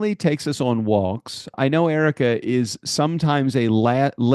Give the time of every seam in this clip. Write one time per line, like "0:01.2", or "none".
0:01.5